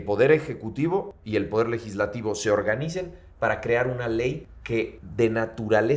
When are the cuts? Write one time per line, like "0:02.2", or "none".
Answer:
0:01.2
0:04.8